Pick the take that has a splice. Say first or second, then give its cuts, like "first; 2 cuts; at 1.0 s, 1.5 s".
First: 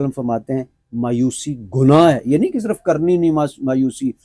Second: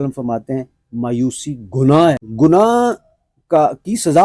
second; 1 cut; at 2.2 s